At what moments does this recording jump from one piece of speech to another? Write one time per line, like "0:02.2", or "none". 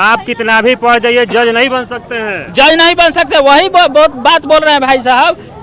none

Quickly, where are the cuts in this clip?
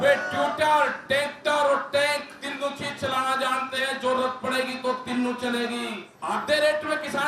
0:06.1

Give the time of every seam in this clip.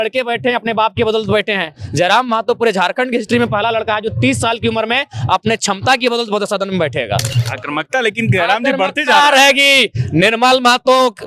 0:07.4

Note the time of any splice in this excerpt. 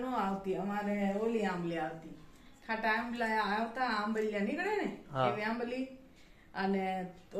none

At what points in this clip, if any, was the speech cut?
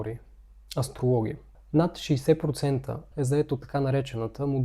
0:01.5
0:03.1

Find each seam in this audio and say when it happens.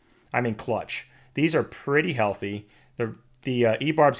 none

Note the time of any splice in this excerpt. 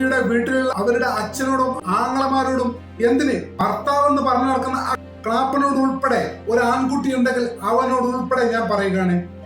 0:00.7
0:01.8
0:03.5

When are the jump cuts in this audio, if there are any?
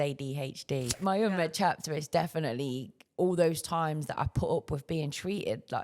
0:01.0

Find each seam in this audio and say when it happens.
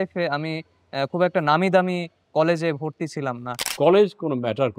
0:03.6

